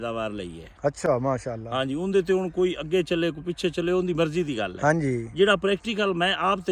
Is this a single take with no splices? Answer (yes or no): yes